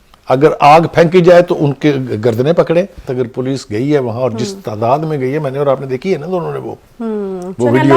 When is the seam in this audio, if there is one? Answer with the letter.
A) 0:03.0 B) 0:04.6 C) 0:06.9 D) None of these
A